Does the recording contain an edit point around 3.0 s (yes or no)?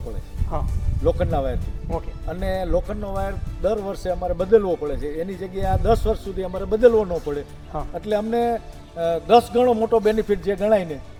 no